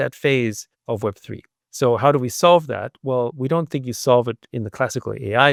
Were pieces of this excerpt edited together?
no; 0 cuts

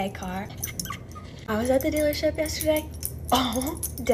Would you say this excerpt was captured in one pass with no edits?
yes; 0 cuts

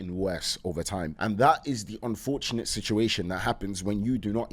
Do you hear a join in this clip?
no; 0 cuts

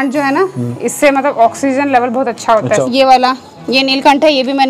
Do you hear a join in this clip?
yes; 1 cut; at 2.8 s

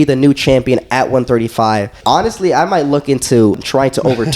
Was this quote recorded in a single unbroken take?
no; 2 cuts; at 1.9 s, 3.6 s

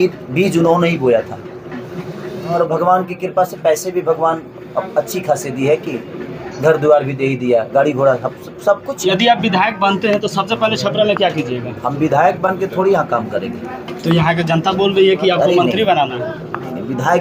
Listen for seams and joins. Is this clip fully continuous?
no; 2 cuts; at 2.5 s, 8.9 s

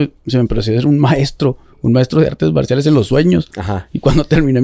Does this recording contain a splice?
no; 0 cuts

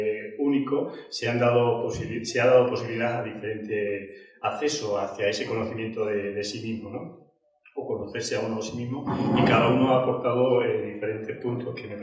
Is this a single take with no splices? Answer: yes; 0 cuts

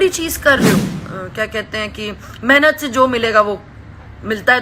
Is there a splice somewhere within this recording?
yes; 1 cut; at 1.0 s

